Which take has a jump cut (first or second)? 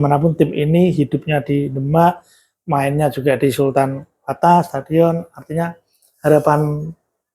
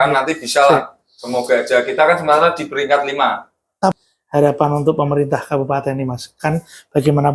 second